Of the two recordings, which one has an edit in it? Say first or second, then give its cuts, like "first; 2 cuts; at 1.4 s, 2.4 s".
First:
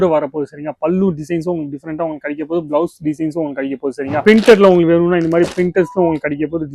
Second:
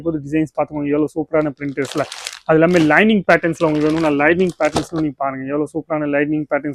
first; 1 cut; at 4.1 s